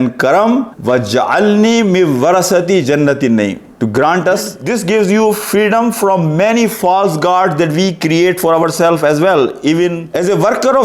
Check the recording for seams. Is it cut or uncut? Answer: cut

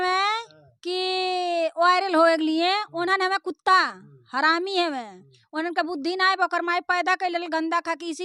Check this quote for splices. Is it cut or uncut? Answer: uncut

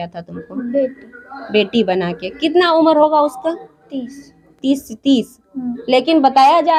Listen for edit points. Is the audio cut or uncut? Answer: uncut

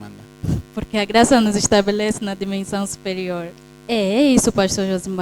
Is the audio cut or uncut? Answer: cut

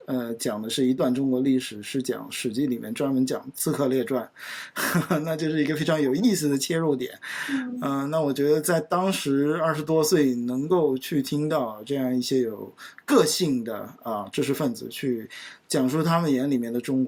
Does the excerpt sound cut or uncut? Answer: uncut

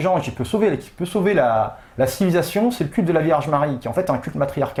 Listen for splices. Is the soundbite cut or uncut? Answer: uncut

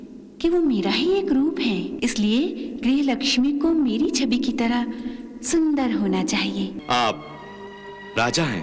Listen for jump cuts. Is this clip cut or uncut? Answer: cut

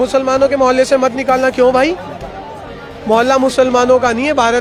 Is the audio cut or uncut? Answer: uncut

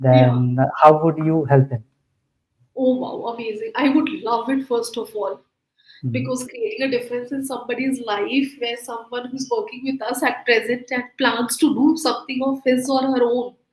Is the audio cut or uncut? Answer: uncut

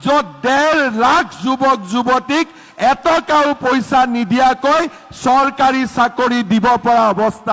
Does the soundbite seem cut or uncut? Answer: uncut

